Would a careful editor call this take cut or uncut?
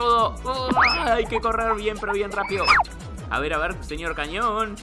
cut